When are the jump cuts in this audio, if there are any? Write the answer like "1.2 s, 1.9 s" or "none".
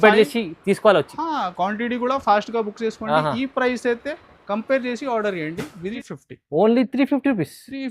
6.0 s